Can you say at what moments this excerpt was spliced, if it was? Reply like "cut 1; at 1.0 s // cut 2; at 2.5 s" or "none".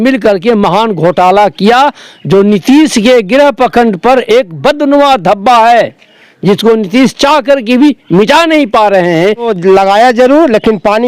cut 1; at 9.5 s